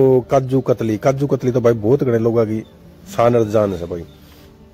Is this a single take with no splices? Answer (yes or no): yes